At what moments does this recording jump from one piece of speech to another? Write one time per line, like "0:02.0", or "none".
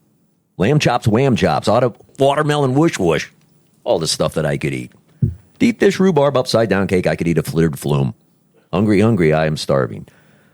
0:02.0